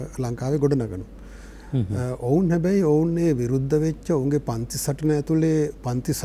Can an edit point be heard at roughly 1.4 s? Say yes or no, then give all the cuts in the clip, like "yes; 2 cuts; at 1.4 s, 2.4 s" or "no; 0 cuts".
no; 0 cuts